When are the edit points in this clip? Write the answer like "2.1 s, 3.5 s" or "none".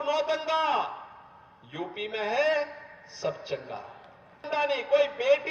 4.5 s